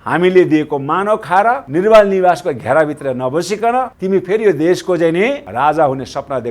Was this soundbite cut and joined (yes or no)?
yes